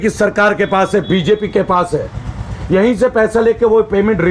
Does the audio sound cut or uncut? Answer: uncut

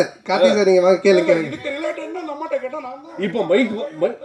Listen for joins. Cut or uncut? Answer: cut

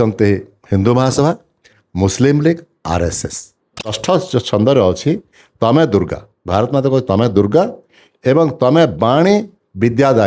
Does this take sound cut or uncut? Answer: cut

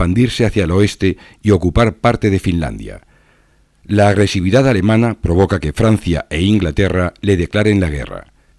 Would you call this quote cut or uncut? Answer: cut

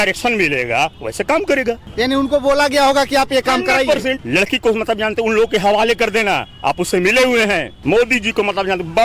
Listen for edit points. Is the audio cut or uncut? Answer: cut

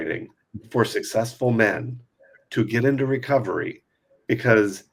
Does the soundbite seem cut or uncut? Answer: uncut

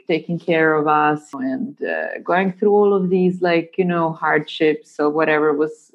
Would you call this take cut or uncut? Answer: cut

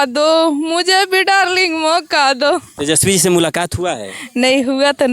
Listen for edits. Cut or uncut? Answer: cut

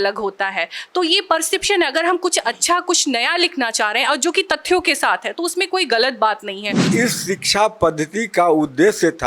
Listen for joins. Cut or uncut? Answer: cut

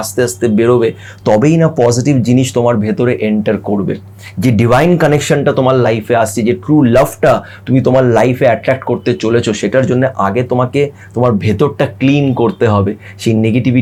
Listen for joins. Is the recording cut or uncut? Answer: uncut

